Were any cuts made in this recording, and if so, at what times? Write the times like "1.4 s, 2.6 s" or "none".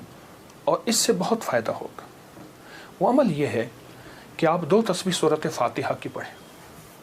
none